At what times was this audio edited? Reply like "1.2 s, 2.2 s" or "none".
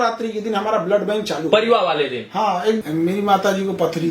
2.8 s